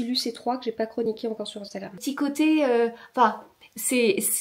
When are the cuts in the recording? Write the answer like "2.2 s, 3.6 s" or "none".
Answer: 2.0 s